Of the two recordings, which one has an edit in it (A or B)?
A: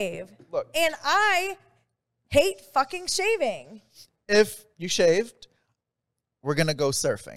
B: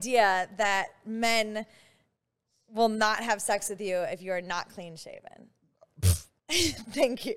B